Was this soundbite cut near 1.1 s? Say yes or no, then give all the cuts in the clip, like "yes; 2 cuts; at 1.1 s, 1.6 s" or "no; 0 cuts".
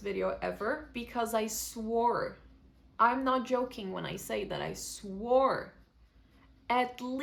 no; 0 cuts